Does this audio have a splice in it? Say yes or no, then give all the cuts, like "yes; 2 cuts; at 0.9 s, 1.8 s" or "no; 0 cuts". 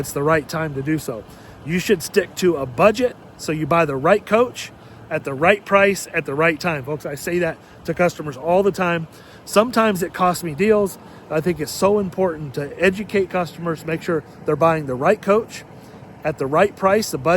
no; 0 cuts